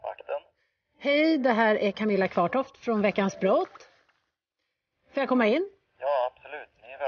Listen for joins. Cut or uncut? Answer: uncut